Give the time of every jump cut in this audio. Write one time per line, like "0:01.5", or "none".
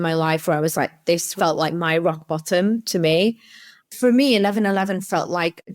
0:01.3
0:03.5